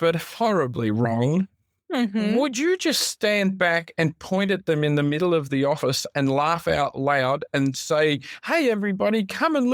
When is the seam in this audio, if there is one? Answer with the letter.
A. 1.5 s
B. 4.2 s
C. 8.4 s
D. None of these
D